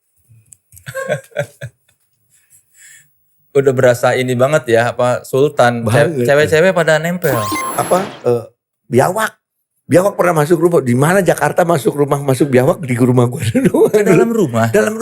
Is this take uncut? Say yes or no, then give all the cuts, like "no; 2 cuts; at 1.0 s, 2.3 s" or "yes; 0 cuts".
no; 1 cut; at 7.6 s